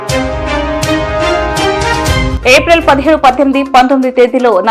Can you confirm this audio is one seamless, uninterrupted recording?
no; 1 cut; at 2.3 s

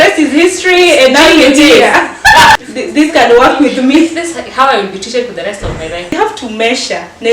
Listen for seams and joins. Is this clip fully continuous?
no; 2 cuts; at 2.5 s, 6.1 s

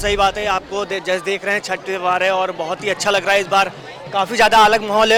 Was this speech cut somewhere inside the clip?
no; 0 cuts

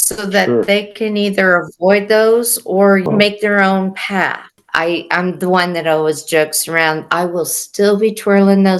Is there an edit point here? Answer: yes; 2 cuts; at 3.1 s, 4.5 s

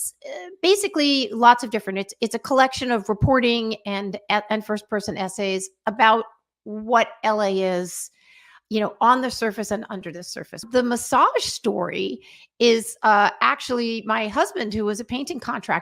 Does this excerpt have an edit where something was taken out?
yes; 1 cut; at 10.6 s

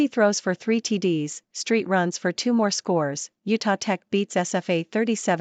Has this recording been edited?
no; 0 cuts

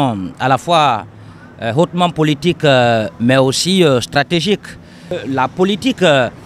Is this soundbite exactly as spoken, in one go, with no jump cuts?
no; 1 cut; at 5.2 s

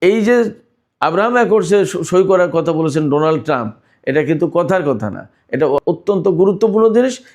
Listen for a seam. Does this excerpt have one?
yes; 1 cut; at 5.8 s

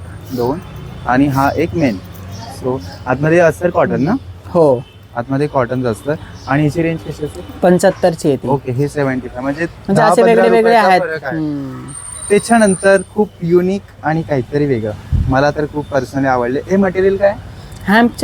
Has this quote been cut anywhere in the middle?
no; 0 cuts

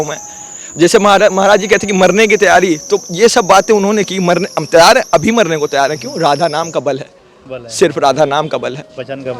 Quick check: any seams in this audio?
no; 0 cuts

